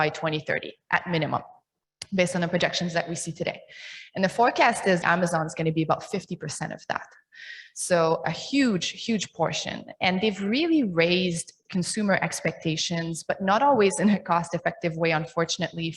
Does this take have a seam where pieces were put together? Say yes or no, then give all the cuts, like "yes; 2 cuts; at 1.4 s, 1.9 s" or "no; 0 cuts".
yes; 1 cut; at 5.0 s